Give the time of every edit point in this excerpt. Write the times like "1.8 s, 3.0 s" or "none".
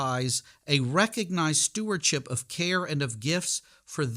none

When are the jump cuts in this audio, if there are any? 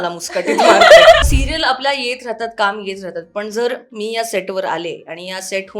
1.2 s

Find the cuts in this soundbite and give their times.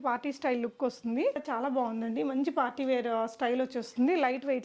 1.4 s

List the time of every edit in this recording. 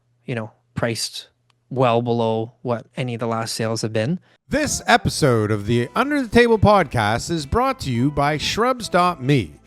4.3 s

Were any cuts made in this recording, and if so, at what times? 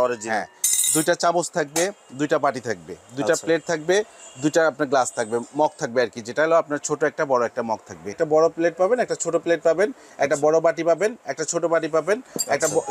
8.2 s

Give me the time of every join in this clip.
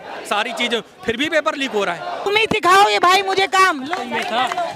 2.3 s

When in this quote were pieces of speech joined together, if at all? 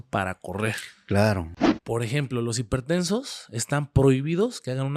1.5 s

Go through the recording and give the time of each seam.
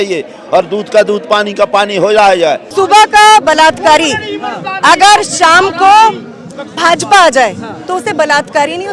2.6 s

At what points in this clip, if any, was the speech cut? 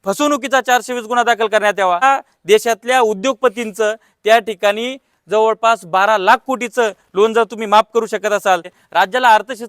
2.0 s, 8.7 s

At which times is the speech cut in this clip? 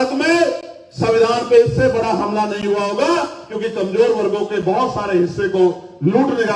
none

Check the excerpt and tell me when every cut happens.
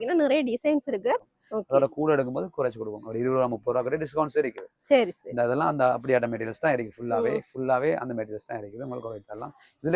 1.4 s

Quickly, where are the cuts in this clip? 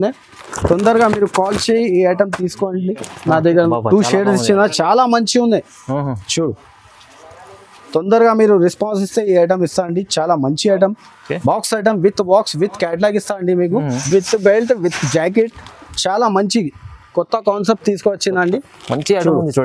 3.7 s, 14.0 s

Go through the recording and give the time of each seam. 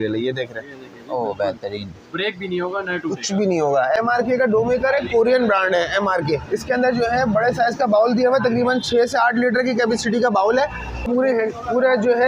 4.0 s, 11.1 s

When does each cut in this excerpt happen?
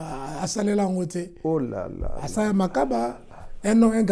none

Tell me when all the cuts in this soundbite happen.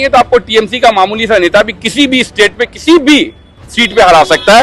none

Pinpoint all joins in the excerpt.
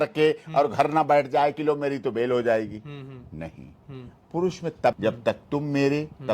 5.0 s

